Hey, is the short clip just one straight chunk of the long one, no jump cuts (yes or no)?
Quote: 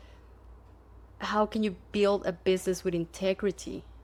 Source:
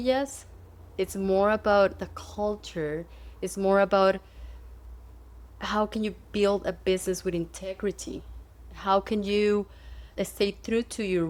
yes